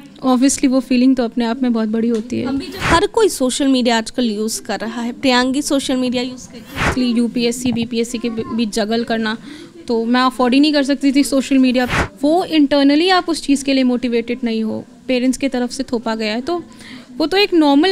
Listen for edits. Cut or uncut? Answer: cut